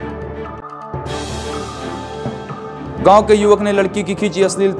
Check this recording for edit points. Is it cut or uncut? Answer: cut